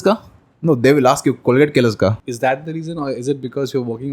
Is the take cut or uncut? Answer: cut